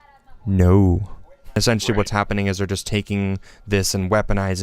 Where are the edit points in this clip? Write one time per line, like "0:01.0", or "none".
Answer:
0:01.6